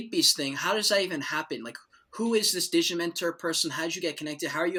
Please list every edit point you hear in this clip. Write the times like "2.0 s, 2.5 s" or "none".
none

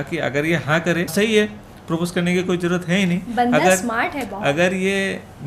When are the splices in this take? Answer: 1.1 s

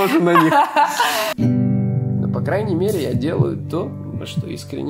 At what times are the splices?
1.3 s

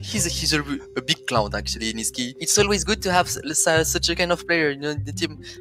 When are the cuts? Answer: 2.4 s

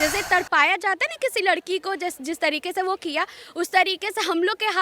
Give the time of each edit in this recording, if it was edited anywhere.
none

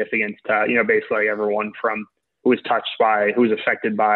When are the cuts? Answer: none

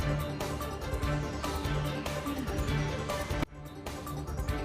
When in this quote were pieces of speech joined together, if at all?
1.2 s

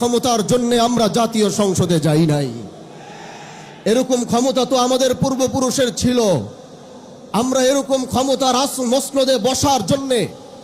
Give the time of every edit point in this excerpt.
none

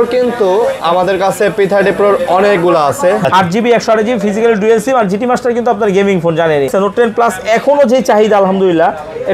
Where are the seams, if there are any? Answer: 3.2 s, 6.7 s

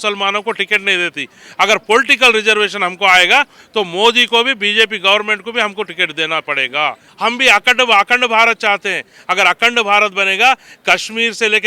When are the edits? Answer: 7.1 s

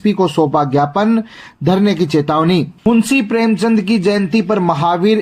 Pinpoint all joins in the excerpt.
2.7 s

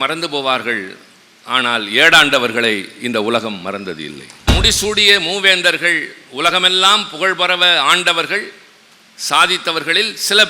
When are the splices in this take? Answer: 4.5 s

